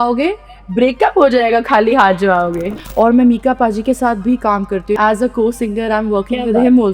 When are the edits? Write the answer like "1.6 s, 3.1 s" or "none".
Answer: 2.7 s, 5.0 s